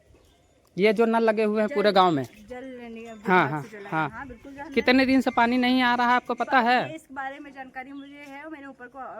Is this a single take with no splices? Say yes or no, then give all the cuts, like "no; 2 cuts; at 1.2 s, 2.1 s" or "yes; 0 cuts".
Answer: yes; 0 cuts